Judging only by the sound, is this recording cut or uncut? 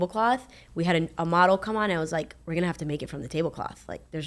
uncut